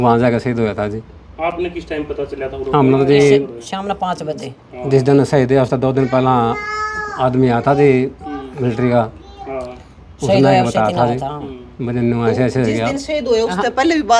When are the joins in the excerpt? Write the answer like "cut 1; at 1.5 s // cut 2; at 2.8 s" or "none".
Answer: none